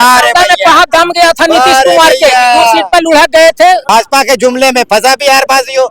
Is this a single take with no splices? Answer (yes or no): no